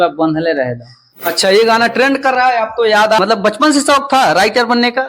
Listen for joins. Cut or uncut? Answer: cut